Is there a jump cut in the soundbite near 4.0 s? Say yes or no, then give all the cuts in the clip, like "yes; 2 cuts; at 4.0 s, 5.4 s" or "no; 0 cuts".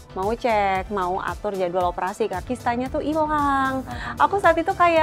no; 1 cut; at 2.4 s